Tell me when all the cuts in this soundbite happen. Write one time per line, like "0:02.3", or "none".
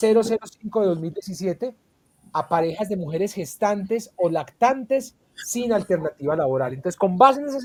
none

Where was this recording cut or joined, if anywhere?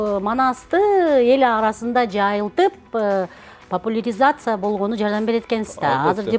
none

